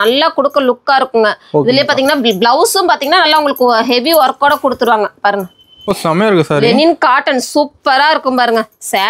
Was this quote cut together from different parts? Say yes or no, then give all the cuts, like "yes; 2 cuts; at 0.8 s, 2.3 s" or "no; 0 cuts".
yes; 1 cut; at 5.8 s